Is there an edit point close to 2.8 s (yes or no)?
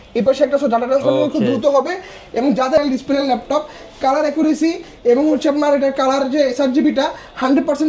yes